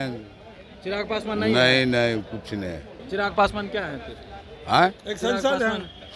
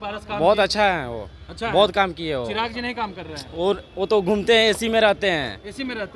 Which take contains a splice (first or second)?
first